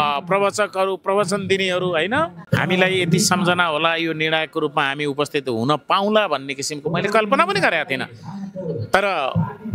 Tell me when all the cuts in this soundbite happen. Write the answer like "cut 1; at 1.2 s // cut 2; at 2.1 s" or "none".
cut 1; at 2.4 s